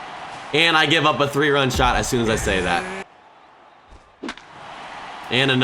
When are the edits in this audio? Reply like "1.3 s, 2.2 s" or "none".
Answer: 3.0 s